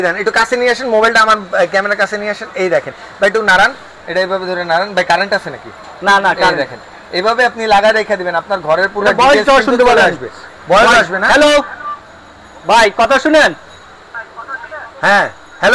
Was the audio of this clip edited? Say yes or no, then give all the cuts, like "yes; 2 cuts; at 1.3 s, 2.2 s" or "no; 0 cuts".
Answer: no; 0 cuts